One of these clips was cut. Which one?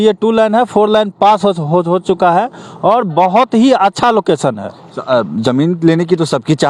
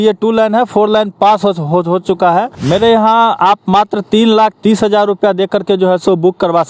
second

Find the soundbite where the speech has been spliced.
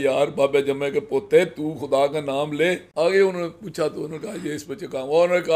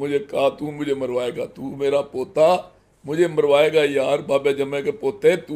first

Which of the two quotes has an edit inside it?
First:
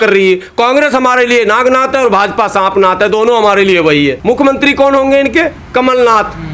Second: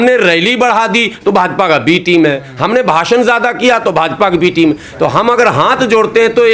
first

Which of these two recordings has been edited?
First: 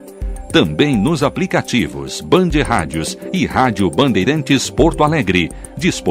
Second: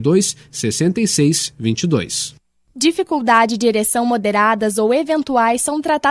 second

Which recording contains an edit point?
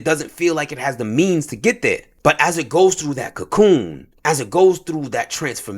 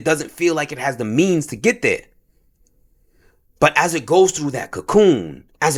first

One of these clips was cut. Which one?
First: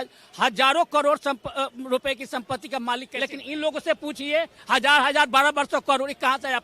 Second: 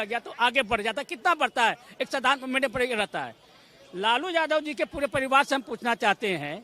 first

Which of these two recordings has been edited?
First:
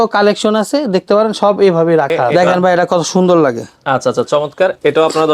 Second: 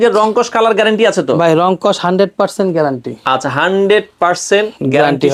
first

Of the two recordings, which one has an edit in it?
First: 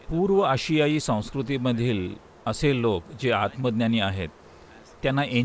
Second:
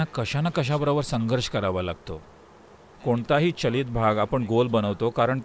second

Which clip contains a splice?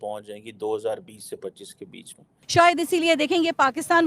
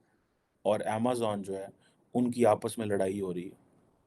first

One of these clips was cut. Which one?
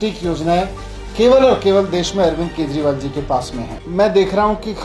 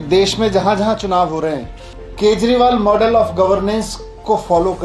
first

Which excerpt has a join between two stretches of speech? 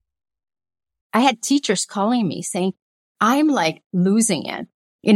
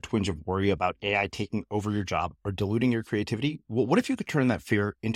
first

